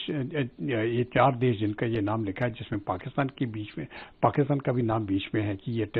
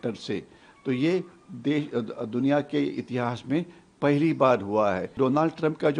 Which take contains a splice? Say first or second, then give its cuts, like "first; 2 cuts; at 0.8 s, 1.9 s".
second; 1 cut; at 5.1 s